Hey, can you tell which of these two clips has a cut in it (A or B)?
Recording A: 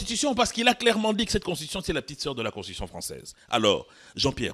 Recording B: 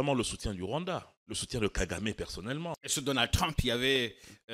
B